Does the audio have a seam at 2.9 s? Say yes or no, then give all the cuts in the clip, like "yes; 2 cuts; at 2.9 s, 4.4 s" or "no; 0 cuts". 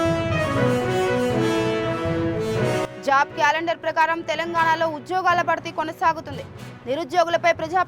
yes; 1 cut; at 2.9 s